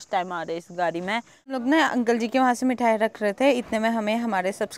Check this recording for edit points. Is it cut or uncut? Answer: cut